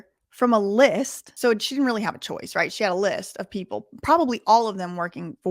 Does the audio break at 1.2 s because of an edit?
yes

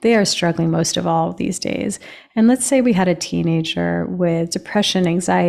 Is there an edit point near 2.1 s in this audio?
no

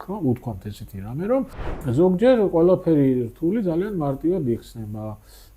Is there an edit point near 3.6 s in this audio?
no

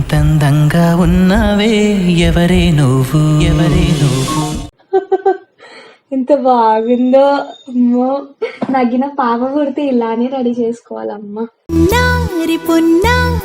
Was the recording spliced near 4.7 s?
yes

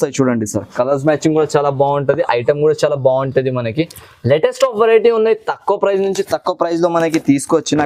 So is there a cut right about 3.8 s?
no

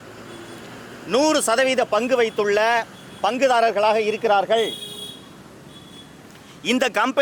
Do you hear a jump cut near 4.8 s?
no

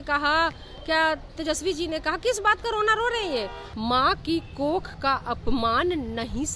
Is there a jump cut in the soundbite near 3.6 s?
yes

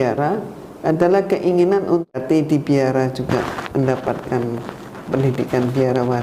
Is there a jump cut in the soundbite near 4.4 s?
no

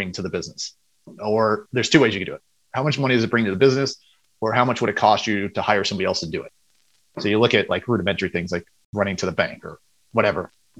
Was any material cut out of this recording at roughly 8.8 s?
yes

